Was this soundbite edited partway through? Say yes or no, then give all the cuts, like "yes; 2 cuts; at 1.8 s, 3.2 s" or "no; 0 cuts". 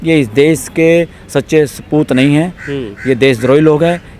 no; 0 cuts